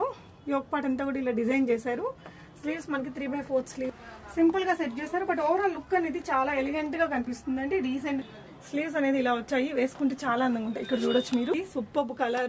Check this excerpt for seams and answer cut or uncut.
cut